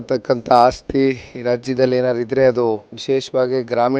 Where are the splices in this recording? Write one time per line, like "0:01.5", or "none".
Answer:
0:02.9

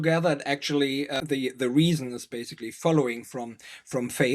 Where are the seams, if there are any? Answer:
0:01.2

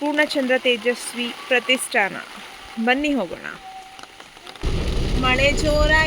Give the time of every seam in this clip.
0:04.6

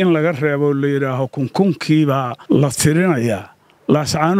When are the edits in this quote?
0:02.3

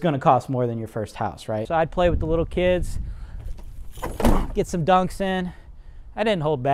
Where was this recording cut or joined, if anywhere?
0:01.7

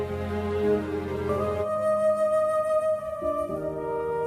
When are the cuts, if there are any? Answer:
0:01.1

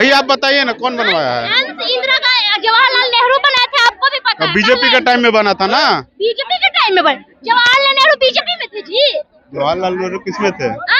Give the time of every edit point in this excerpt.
none

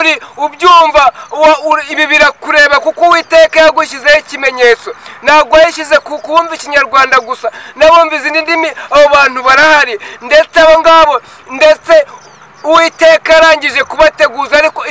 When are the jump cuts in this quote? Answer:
none

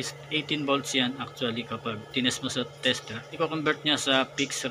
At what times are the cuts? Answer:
0:03.3

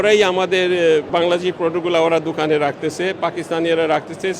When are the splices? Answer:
0:01.1

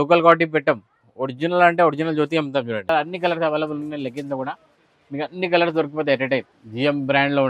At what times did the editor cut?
0:02.8
0:06.6

